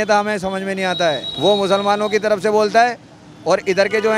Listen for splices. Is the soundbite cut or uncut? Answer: uncut